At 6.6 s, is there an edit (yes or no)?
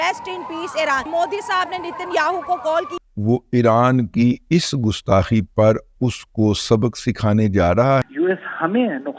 no